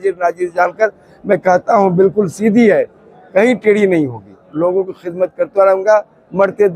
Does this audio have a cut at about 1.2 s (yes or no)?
no